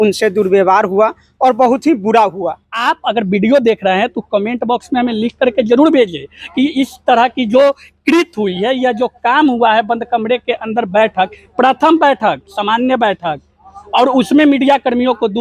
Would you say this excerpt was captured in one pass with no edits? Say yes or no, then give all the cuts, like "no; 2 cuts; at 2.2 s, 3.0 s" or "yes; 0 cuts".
no; 1 cut; at 2.8 s